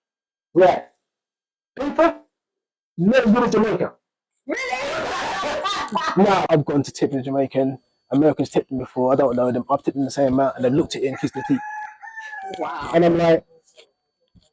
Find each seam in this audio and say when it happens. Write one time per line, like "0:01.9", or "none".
0:06.5